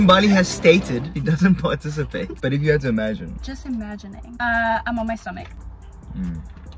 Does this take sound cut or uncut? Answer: cut